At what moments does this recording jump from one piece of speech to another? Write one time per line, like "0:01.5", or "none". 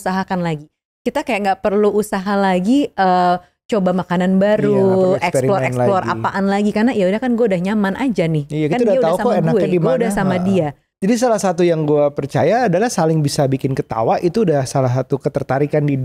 0:10.9